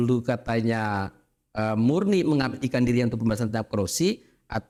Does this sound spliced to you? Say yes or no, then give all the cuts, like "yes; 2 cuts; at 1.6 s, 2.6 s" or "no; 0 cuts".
no; 0 cuts